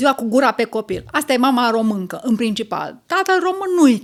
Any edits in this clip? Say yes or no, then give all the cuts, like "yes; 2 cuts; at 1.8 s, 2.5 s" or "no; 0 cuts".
no; 0 cuts